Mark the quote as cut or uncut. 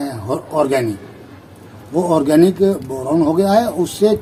uncut